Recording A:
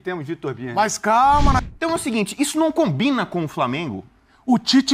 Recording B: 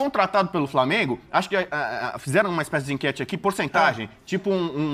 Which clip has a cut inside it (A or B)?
A